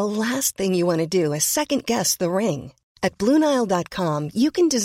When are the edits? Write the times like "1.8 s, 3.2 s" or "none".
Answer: none